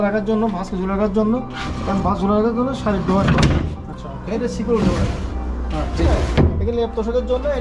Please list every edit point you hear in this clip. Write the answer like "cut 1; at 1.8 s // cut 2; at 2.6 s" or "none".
none